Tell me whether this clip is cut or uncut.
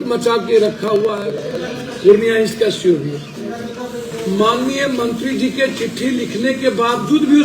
cut